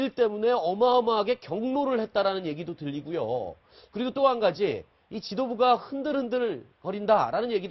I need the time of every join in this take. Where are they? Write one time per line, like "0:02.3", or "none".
none